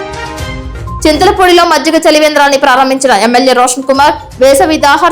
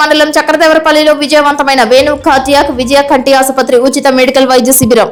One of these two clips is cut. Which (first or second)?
first